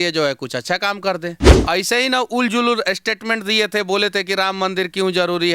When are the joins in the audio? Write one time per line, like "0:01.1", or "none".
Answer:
0:01.5